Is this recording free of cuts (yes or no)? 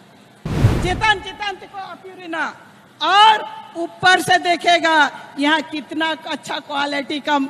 yes